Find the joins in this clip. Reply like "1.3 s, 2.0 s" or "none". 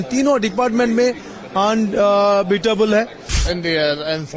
3.4 s